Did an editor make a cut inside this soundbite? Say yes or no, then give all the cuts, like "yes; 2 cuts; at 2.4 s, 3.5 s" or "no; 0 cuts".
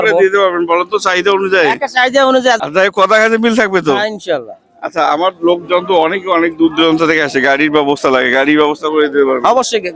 yes; 1 cut; at 2.6 s